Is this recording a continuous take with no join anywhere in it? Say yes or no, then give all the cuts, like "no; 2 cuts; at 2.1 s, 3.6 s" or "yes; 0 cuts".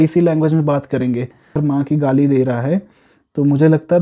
no; 1 cut; at 1.6 s